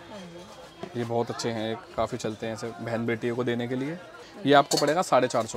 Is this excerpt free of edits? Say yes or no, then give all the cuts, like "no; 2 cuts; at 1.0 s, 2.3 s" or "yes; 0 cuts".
no; 1 cut; at 4.2 s